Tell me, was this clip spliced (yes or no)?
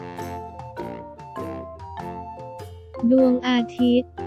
yes